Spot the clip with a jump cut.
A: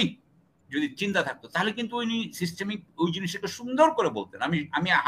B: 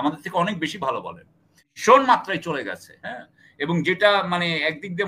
B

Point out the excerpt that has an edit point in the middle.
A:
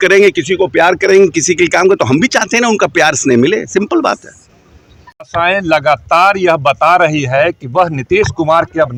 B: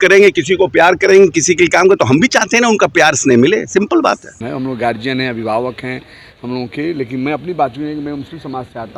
B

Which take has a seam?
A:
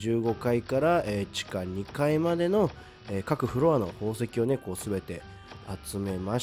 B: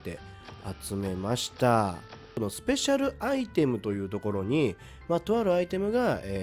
B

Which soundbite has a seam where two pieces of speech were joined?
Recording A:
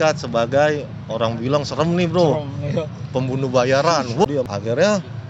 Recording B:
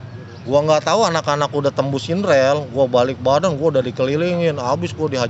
A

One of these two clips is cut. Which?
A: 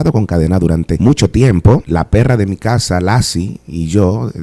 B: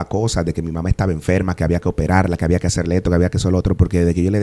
A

